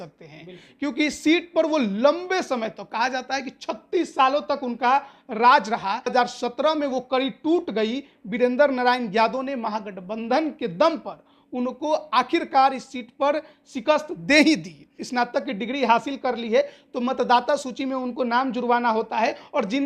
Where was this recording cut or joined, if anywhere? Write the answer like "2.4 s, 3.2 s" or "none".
6.1 s, 15.0 s